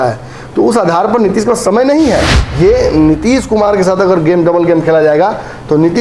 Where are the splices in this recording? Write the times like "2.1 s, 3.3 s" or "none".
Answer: 2.4 s